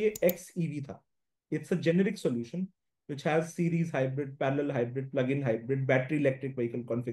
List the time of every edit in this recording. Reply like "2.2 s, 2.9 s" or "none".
none